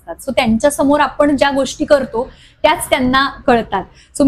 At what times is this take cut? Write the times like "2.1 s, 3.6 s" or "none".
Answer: none